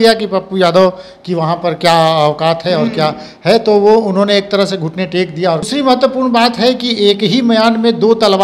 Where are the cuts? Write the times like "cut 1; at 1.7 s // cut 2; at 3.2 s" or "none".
cut 1; at 5.7 s